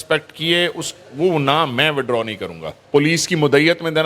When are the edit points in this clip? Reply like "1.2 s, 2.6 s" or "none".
2.8 s

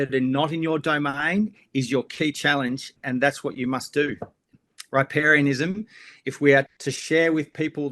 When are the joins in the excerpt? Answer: 3.0 s, 4.5 s, 6.7 s

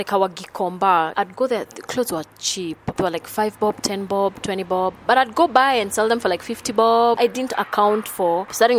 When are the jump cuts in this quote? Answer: 1.1 s, 7.2 s

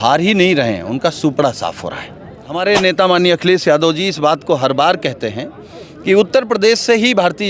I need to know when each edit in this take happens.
2.4 s

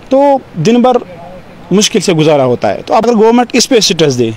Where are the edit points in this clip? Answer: 3.0 s

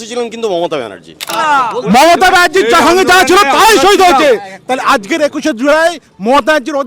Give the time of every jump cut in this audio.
1.3 s

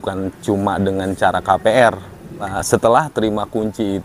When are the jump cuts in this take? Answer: 2.5 s

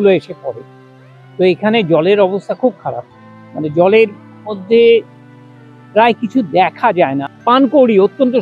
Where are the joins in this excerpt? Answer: 7.4 s

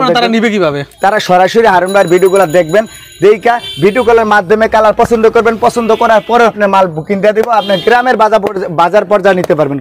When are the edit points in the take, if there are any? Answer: 0.9 s, 6.6 s

